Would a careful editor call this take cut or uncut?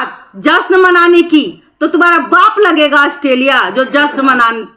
uncut